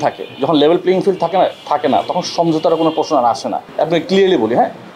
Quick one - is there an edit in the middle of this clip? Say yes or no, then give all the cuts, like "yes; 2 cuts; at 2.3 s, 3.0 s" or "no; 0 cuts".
yes; 1 cut; at 3.6 s